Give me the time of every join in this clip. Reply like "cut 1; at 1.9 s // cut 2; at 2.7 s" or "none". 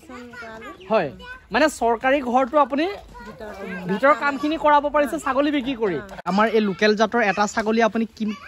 cut 1; at 6.3 s

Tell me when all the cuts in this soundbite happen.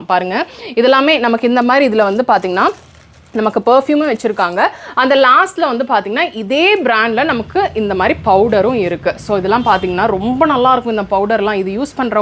none

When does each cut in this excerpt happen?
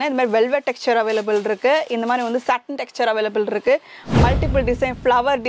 none

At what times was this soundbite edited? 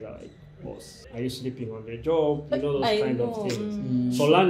cut 1; at 0.9 s

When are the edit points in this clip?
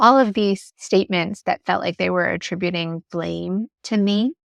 none

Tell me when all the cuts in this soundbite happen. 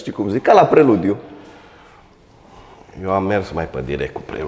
none

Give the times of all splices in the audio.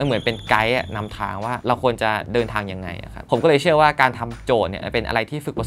none

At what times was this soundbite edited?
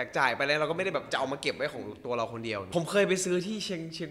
cut 1; at 2.7 s

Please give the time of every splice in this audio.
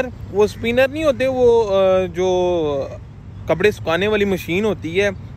none

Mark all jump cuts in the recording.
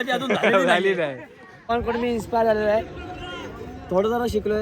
cut 1; at 1.7 s

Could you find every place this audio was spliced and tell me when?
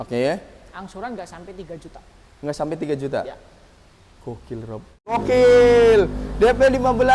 cut 1; at 5.2 s

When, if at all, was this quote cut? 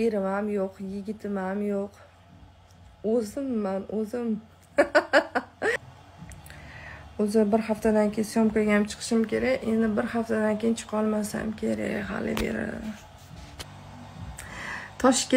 cut 1; at 5.8 s // cut 2; at 13.6 s

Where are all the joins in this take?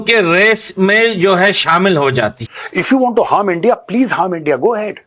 cut 1; at 2.5 s

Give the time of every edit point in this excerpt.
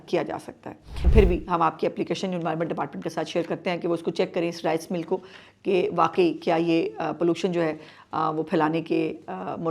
cut 1; at 1.1 s

